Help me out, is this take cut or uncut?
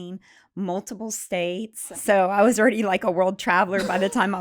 cut